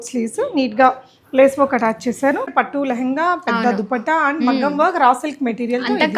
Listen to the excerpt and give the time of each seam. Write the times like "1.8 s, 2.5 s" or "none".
2.5 s